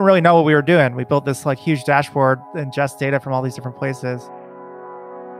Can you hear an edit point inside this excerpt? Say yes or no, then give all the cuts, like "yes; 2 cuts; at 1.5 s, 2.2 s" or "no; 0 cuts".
no; 0 cuts